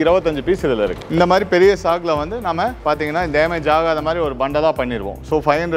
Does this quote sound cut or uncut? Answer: cut